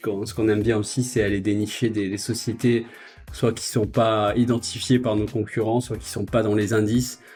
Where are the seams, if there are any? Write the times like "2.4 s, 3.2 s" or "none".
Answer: none